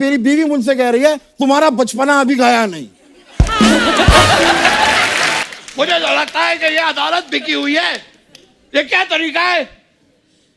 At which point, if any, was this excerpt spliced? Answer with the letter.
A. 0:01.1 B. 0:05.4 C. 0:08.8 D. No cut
B